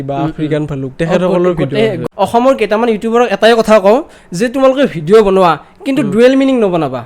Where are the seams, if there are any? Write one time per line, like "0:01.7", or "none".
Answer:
0:02.0